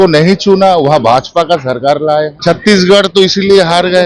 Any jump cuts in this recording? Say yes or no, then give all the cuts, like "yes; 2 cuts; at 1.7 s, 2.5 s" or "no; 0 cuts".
yes; 1 cut; at 2.3 s